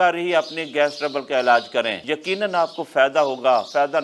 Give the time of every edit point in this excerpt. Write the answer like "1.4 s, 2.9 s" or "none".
2.0 s